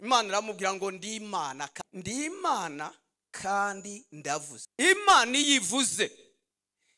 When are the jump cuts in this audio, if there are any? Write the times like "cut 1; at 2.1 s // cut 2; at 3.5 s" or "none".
cut 1; at 1.7 s // cut 2; at 4.6 s